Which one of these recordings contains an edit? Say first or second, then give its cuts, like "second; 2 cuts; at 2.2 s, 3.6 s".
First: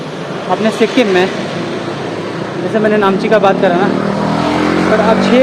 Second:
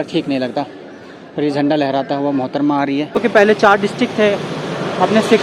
second; 1 cut; at 3.3 s